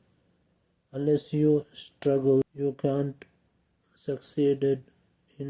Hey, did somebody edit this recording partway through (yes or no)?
yes